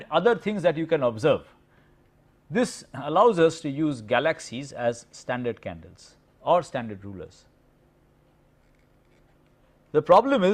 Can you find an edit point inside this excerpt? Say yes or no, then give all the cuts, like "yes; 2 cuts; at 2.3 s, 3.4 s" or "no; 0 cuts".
no; 0 cuts